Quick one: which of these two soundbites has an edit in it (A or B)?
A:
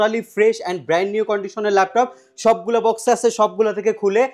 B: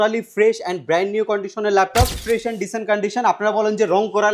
B